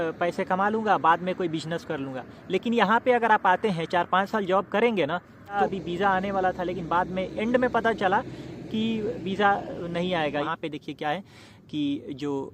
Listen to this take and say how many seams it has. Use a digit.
2